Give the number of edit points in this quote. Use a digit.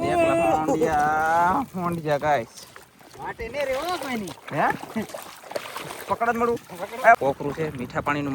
1